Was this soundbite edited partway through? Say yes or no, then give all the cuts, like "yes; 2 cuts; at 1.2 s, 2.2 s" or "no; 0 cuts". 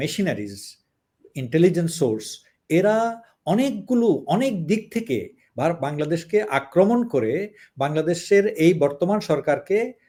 no; 0 cuts